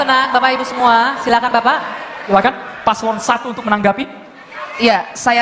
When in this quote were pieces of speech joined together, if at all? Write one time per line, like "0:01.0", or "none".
0:02.3